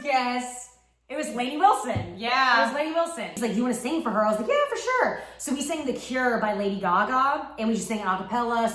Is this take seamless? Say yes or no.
no